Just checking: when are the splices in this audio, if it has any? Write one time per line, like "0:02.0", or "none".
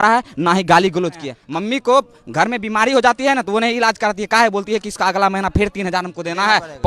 0:01.3